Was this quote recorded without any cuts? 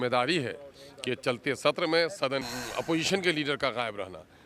no; 1 cut; at 2.4 s

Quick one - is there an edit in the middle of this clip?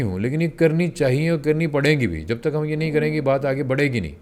no; 0 cuts

